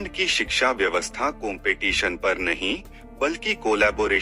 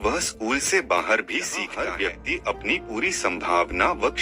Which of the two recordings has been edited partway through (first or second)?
second